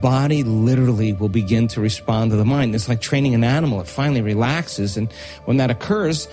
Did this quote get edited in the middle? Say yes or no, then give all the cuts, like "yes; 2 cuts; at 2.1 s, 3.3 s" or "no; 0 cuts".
no; 0 cuts